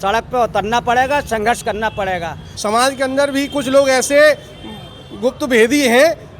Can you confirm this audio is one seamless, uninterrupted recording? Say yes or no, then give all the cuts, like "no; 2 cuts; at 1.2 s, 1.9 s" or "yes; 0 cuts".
no; 1 cut; at 2.5 s